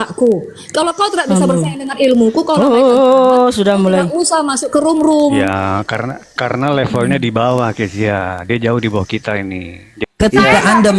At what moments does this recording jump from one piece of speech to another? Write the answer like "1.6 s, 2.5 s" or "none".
10.0 s